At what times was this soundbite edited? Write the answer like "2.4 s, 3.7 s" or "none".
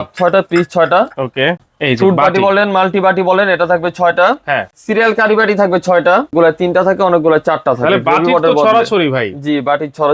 1.7 s, 4.7 s, 6.3 s